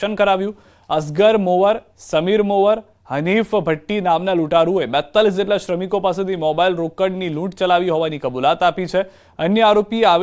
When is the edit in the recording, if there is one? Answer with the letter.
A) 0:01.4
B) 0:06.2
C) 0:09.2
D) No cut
D